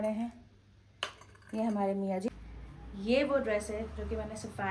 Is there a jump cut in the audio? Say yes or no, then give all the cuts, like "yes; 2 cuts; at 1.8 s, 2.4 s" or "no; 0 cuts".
yes; 1 cut; at 2.3 s